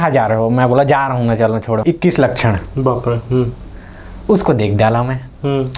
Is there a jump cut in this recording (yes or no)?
yes